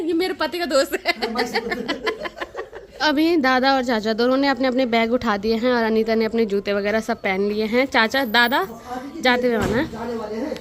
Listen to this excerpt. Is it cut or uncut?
uncut